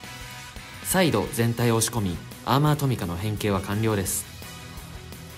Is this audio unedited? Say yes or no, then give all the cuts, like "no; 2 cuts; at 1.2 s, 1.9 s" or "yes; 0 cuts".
no; 2 cuts; at 0.9 s, 4.2 s